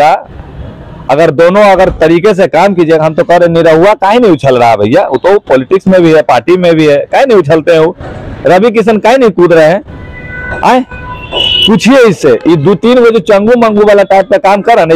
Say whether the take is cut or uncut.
uncut